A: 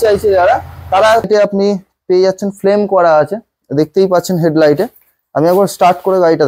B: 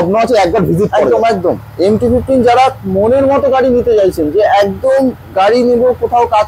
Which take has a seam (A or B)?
A